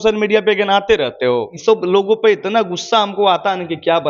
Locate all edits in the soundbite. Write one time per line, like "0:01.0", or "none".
0:01.5